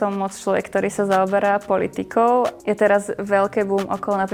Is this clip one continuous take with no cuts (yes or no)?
yes